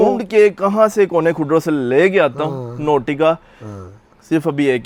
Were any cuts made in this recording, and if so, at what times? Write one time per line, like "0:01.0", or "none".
none

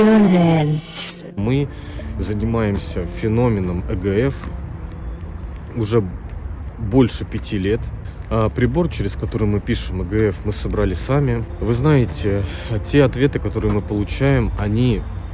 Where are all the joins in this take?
0:01.4

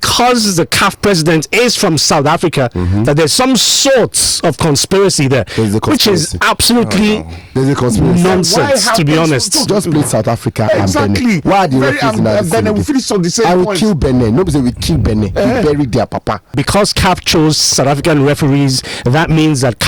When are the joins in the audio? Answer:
0:09.7
0:16.6

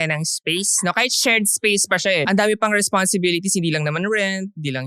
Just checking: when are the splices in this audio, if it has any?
0:02.2

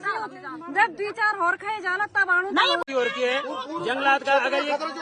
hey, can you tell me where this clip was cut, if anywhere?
0:02.8

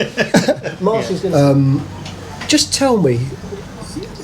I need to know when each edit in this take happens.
0:01.2

